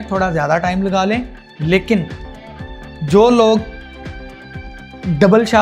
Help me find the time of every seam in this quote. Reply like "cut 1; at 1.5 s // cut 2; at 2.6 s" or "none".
none